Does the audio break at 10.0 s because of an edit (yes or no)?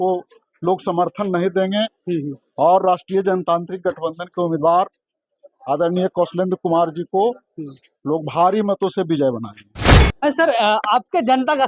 yes